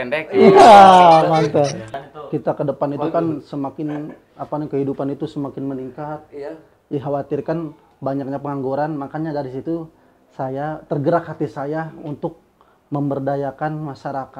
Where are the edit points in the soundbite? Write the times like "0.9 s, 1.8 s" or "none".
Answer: 1.9 s